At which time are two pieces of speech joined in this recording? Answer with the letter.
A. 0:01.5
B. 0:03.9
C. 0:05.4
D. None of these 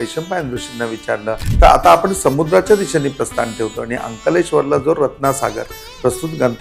A